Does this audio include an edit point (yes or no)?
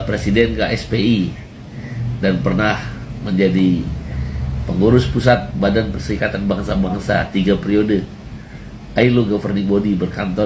no